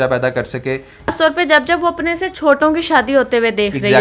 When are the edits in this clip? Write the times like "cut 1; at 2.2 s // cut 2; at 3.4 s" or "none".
cut 1; at 1.1 s